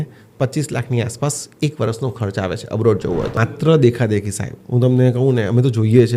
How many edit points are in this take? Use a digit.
1